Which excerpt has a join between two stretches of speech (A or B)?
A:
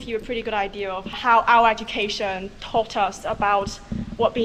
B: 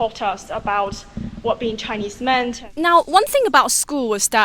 B